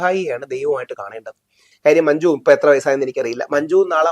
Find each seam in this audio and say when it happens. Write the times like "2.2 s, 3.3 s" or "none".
1.7 s